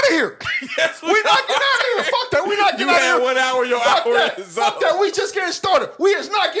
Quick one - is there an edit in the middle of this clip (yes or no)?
no